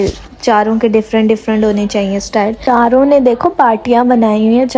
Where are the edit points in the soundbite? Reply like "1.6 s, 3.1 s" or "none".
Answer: 2.6 s